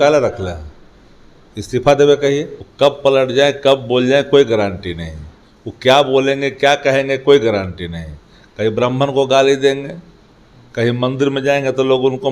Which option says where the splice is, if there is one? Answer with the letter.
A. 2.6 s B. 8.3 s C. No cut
A